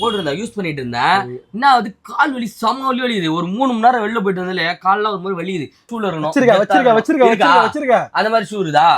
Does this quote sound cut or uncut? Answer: cut